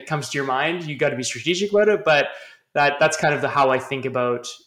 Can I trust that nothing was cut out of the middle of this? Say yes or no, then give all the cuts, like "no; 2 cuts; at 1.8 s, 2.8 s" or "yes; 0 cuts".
yes; 0 cuts